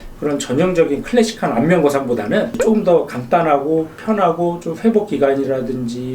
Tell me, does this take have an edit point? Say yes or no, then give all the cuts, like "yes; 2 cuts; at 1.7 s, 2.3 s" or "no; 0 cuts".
no; 0 cuts